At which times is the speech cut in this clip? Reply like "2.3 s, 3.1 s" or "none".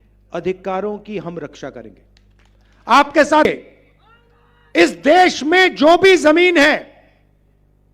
3.5 s